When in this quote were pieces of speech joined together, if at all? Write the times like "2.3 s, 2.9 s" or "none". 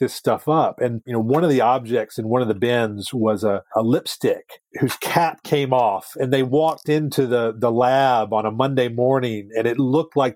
1.1 s, 4.6 s